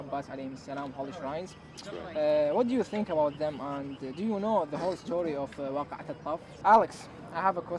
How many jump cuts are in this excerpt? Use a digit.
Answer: 1